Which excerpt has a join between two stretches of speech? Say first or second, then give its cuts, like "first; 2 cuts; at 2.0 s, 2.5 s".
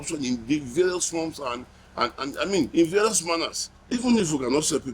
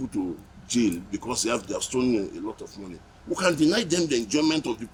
first; 1 cut; at 3.9 s